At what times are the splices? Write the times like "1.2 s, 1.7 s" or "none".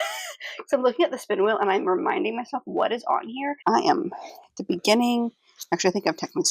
3.6 s